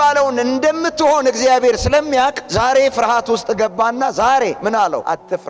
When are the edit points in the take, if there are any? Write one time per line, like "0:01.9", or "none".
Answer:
0:04.6